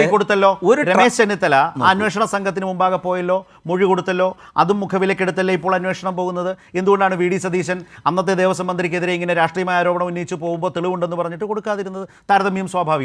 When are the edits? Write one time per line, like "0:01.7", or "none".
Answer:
none